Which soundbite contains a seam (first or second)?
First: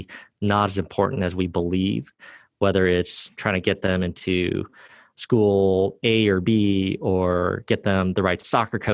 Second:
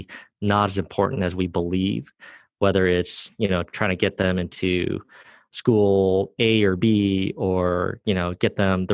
first